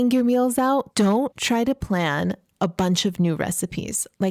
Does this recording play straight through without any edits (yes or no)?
no